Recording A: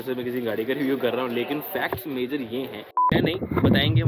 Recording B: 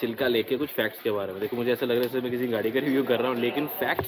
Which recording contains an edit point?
A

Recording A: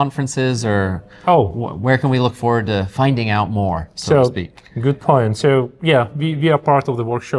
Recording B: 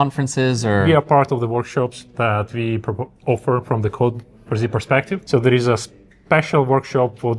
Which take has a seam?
B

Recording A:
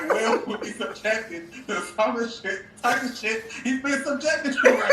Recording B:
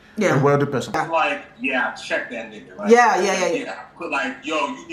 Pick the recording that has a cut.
B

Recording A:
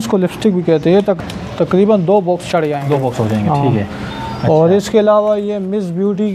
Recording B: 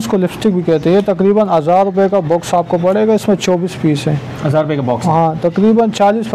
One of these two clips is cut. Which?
A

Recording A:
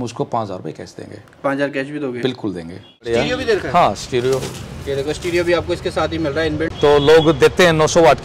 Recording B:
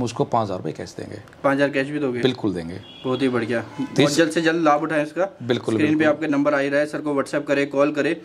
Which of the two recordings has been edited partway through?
A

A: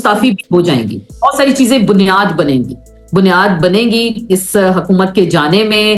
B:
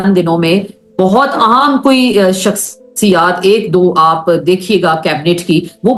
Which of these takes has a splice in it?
A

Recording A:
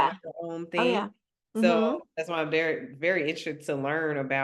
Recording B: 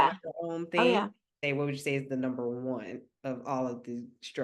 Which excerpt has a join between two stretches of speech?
B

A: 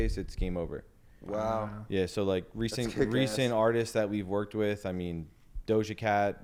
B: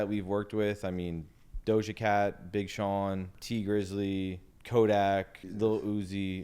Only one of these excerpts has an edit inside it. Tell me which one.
B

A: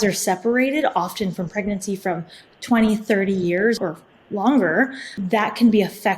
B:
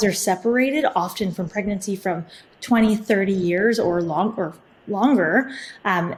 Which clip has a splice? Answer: A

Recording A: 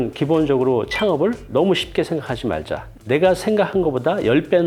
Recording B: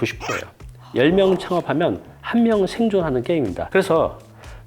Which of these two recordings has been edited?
B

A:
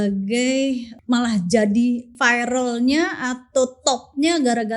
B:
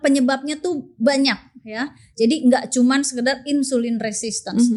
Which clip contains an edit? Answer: A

